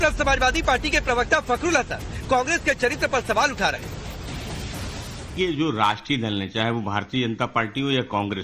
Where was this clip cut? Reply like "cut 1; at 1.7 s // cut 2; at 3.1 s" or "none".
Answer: cut 1; at 6.0 s